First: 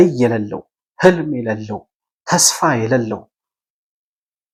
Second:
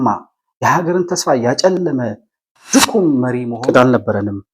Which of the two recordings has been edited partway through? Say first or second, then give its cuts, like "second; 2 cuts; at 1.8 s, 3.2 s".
second; 1 cut; at 3.6 s